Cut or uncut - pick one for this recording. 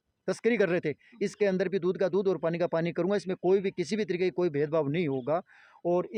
uncut